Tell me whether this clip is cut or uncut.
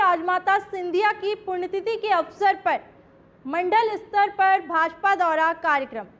uncut